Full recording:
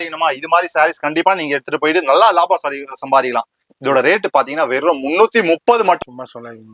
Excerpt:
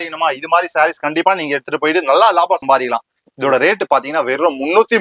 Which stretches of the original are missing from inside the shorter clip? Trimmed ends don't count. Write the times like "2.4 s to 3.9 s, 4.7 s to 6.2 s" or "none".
2.6 s to 3.0 s